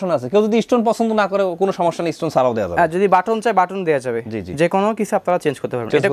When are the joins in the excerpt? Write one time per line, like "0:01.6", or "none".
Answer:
none